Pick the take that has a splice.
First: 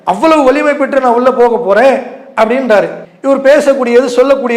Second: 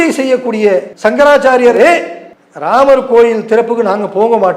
second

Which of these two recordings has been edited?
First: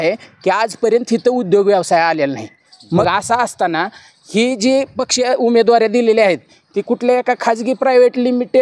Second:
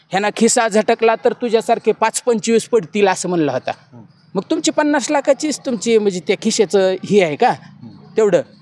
first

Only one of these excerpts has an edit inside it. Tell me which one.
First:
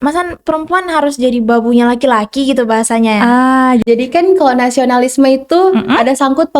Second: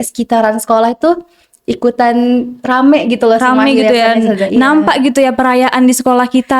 first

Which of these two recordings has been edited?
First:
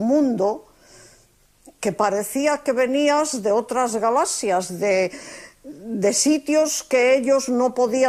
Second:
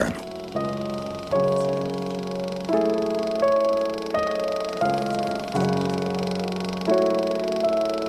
second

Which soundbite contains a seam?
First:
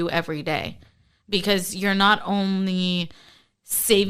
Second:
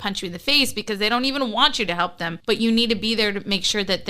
second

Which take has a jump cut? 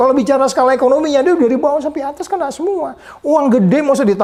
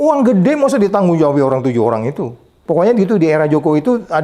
second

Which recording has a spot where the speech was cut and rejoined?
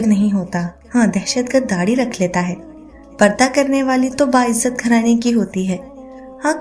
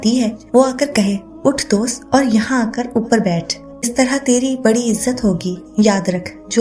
second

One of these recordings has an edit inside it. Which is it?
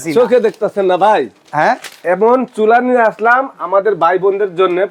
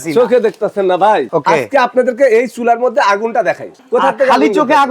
second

